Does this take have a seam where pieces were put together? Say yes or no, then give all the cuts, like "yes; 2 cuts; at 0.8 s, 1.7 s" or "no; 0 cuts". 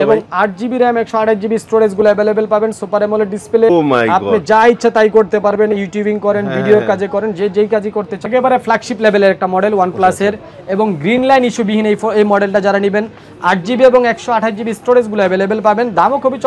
yes; 2 cuts; at 3.7 s, 8.2 s